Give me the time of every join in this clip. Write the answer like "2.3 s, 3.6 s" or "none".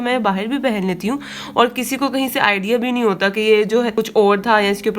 3.9 s